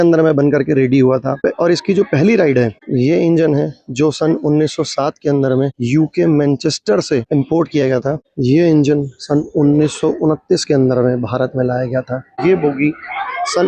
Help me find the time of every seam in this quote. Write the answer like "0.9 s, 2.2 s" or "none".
2.8 s, 8.3 s, 12.4 s